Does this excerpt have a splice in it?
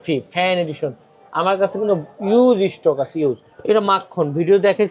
yes; 1 cut; at 3.5 s

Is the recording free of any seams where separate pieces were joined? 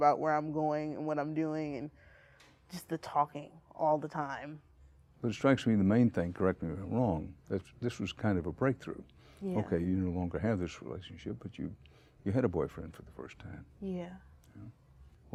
yes; 0 cuts

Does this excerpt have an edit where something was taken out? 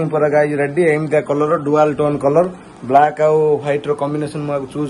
no; 0 cuts

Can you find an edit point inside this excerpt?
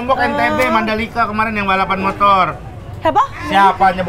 no; 0 cuts

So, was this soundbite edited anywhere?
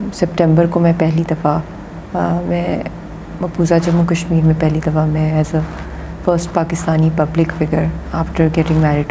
no; 0 cuts

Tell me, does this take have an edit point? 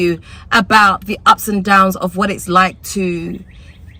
no; 0 cuts

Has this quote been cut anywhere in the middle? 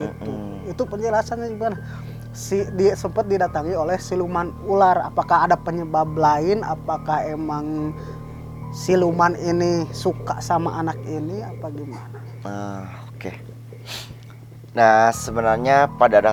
no; 0 cuts

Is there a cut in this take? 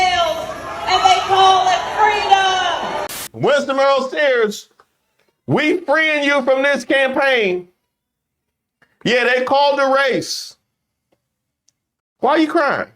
yes; 1 cut; at 3.2 s

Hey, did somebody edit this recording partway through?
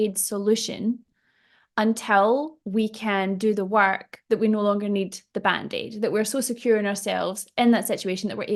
no; 0 cuts

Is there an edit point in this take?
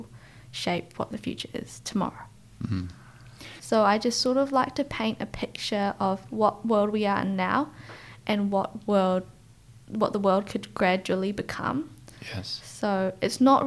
yes; 1 cut; at 3.5 s

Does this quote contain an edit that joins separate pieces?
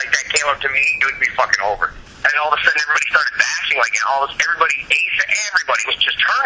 yes; 1 cut; at 1.9 s

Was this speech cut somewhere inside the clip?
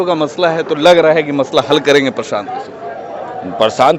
no; 0 cuts

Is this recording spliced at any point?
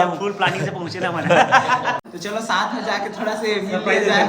yes; 1 cut; at 2.0 s

